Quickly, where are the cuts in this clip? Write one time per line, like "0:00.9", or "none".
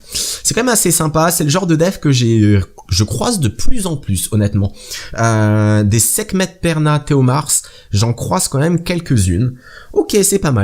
0:01.5